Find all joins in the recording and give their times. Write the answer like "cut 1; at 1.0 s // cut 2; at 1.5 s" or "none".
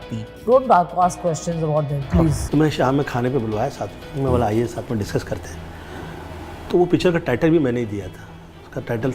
cut 1; at 2.4 s